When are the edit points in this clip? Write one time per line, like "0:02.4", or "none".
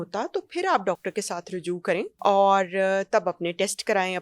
0:02.1